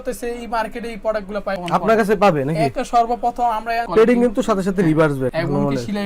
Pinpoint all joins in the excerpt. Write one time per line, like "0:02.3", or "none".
0:03.9